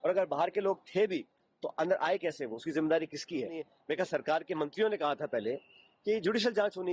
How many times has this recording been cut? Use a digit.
1